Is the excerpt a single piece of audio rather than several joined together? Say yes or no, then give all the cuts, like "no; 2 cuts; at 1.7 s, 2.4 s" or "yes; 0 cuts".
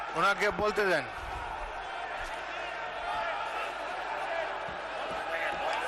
yes; 0 cuts